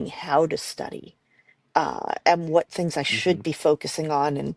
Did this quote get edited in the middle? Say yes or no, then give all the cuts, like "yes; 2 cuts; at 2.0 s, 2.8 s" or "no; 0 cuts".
no; 0 cuts